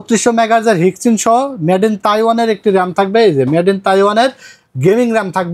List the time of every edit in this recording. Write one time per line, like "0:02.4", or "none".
none